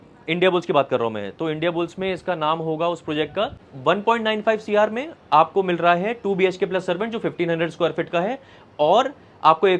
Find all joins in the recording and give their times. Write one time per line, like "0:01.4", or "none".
0:03.7